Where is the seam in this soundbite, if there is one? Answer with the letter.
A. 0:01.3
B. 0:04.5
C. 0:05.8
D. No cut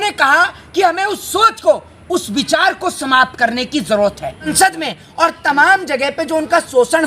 B